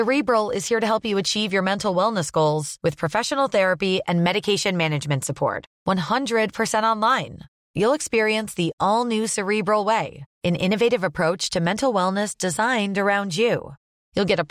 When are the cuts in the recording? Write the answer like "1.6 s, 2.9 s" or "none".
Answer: none